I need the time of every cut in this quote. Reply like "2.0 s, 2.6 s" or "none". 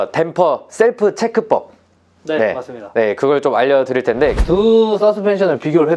4.4 s